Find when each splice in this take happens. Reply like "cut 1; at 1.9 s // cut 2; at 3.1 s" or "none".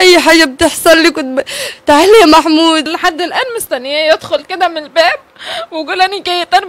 cut 1; at 2.9 s